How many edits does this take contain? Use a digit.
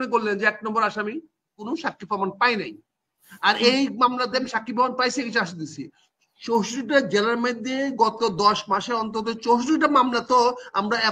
1